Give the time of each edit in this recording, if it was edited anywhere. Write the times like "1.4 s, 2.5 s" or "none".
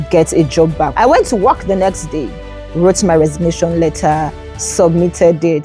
0.9 s